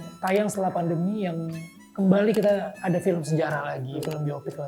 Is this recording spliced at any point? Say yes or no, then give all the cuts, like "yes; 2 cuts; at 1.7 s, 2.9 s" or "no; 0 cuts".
no; 0 cuts